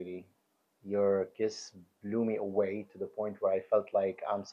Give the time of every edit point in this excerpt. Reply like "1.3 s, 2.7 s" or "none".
none